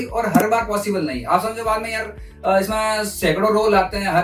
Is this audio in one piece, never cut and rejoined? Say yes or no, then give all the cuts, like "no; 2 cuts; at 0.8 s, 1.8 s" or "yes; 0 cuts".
yes; 0 cuts